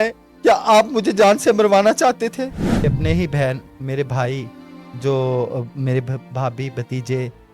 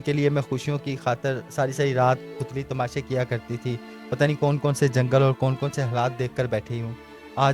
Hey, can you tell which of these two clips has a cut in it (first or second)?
first